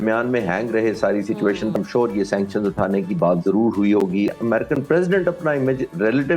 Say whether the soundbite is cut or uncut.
cut